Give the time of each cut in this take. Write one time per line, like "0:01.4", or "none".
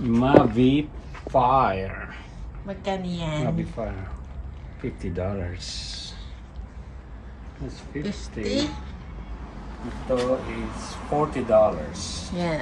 none